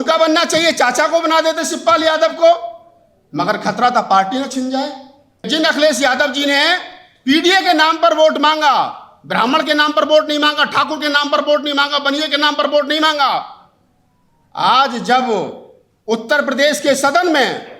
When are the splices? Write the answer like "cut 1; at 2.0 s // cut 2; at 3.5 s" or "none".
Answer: cut 1; at 5.5 s